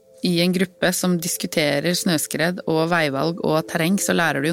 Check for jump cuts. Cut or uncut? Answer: uncut